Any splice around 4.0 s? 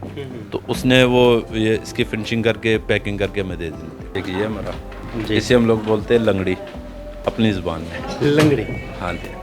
yes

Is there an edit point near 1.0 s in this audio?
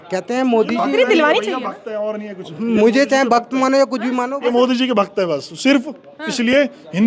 no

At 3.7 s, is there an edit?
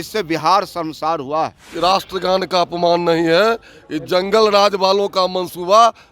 no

